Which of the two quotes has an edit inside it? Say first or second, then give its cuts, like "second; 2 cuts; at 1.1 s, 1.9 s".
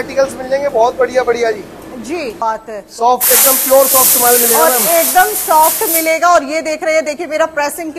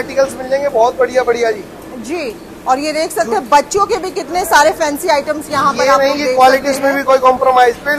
first; 1 cut; at 2.4 s